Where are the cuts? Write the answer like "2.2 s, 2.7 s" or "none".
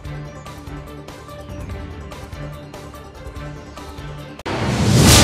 2.8 s